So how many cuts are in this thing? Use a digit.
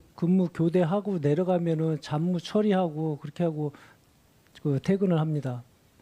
0